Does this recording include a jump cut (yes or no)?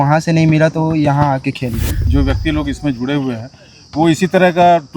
yes